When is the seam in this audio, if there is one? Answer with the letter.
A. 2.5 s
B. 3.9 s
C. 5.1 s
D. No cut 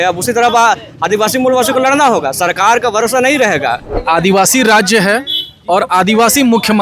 B